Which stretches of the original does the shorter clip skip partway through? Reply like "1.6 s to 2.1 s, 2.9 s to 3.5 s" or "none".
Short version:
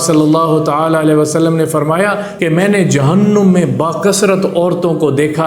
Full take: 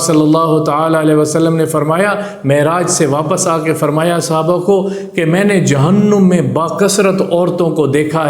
2.3 s to 5.1 s